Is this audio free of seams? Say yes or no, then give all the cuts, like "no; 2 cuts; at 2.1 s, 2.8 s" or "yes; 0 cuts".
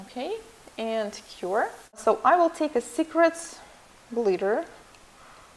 no; 1 cut; at 2.5 s